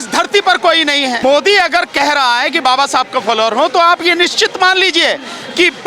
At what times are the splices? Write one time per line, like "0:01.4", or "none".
0:01.2